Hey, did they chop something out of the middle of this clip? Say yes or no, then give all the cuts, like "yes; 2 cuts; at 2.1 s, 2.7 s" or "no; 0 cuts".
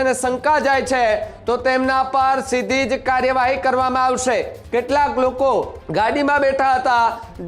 yes; 2 cuts; at 4.6 s, 5.8 s